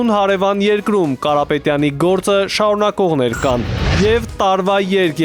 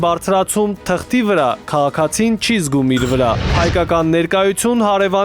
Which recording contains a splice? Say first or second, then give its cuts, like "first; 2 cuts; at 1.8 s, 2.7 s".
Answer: second; 1 cut; at 3.6 s